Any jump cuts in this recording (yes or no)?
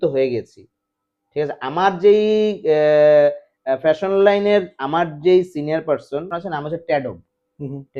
yes